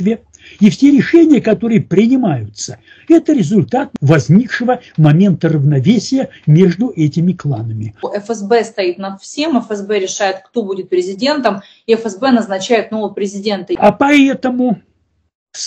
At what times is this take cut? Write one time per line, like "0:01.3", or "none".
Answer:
0:03.9
0:08.1
0:13.8

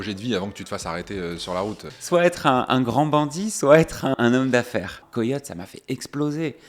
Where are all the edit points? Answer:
0:01.9
0:04.1
0:05.0

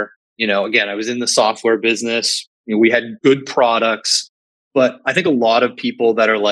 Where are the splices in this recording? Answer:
0:03.1
0:05.1

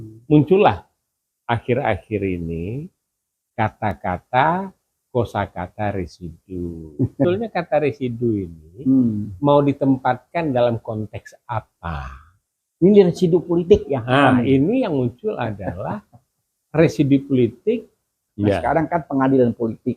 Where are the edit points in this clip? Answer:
0:07.2
0:18.2

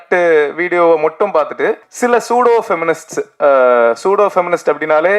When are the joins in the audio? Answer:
0:01.9

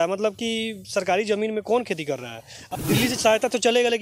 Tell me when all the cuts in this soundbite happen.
0:02.4

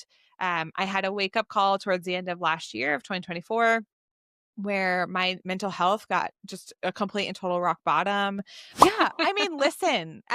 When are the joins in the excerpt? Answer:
0:08.8

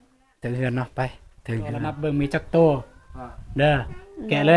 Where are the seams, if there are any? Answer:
0:02.0

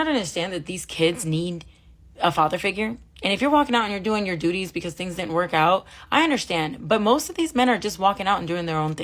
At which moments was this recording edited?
0:06.5

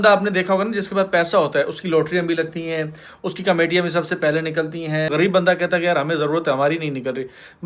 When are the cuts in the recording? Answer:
0:05.1

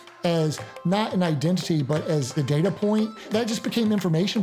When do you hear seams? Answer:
0:02.3
0:03.3

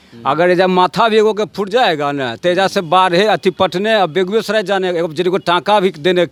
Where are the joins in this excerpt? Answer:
none

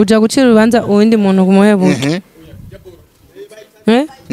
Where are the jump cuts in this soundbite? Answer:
none

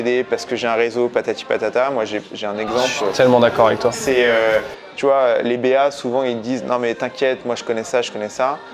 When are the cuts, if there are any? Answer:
none

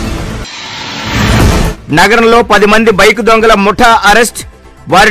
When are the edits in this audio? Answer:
none

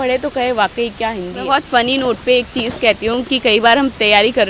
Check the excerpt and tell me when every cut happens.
0:01.4

